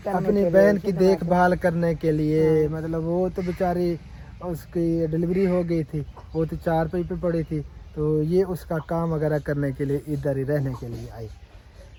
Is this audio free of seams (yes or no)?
yes